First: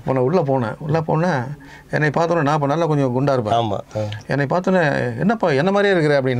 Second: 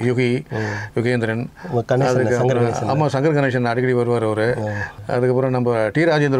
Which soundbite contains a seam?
second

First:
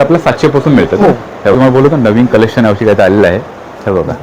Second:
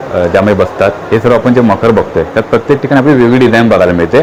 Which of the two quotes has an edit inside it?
first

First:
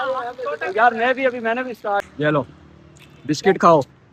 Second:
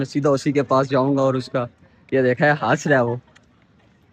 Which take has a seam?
first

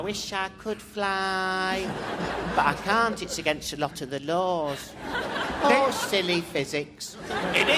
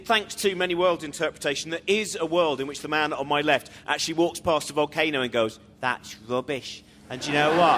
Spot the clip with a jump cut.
first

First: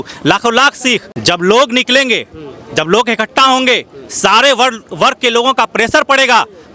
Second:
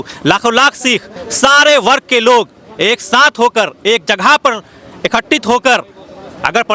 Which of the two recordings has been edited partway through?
first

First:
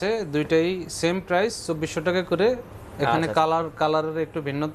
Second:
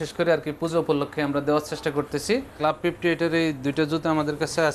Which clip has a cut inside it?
second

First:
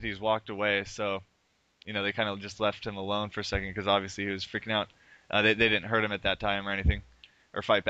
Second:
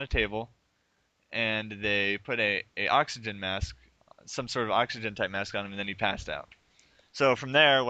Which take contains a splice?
first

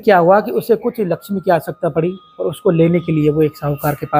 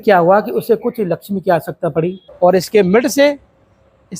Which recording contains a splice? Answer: second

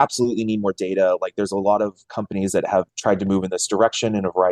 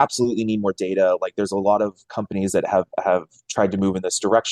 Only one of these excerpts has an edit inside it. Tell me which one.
first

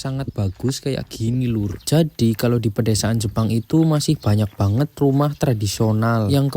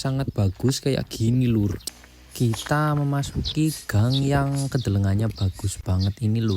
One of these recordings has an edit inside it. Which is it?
second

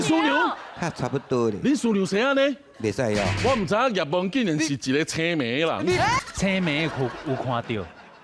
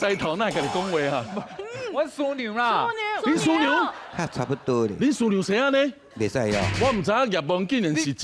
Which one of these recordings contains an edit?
first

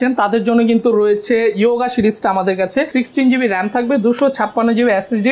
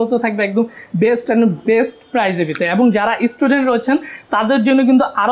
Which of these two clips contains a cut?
first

